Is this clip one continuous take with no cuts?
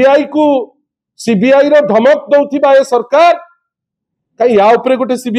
yes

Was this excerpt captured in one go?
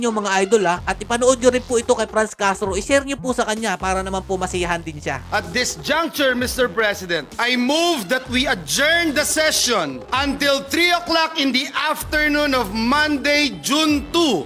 yes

